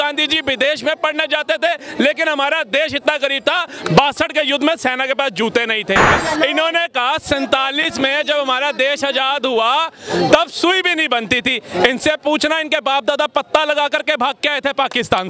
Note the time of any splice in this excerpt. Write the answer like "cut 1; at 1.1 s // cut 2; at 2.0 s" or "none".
cut 1; at 6.1 s